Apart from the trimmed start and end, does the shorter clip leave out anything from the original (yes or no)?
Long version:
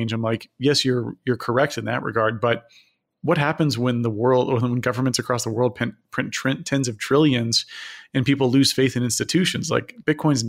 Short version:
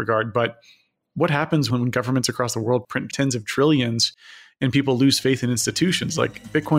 yes